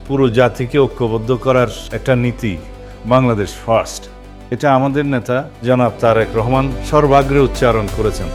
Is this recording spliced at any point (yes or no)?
no